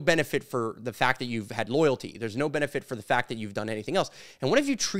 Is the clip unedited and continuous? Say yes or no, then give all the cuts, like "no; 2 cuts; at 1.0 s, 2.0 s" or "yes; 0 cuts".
yes; 0 cuts